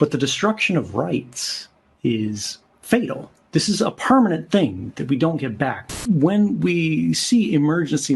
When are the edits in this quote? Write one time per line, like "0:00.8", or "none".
0:05.9